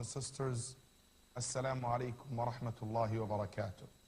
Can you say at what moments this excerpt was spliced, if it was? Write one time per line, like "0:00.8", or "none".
0:02.6

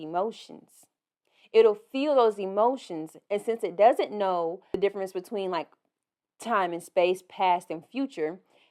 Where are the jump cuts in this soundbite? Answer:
0:04.8

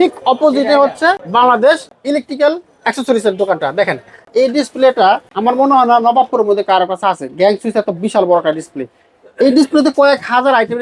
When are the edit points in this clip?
0:01.2
0:01.9
0:04.3
0:05.3

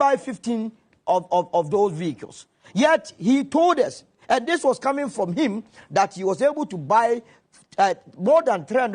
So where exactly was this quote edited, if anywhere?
none

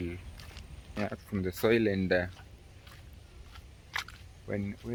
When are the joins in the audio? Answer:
none

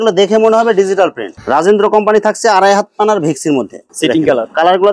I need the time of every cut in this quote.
0:01.4
0:03.8

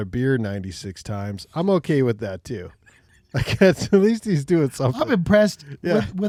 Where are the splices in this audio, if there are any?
none

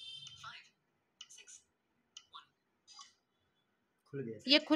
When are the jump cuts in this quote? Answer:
none

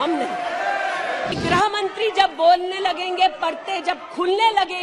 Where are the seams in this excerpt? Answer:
0:01.4

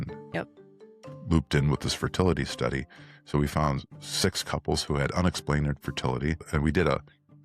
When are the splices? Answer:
0:06.4

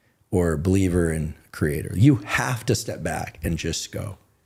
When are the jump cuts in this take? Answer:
none

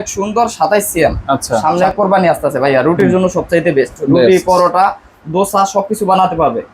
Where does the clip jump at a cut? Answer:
0:01.6

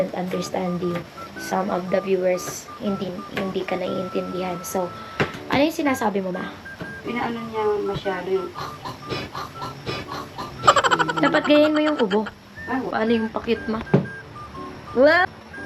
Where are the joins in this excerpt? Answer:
0:07.0
0:12.9

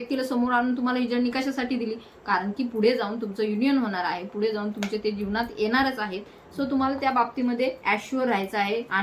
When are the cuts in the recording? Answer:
none

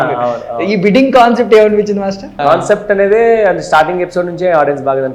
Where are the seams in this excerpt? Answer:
0:02.3

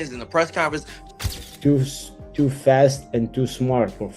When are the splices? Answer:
0:01.0

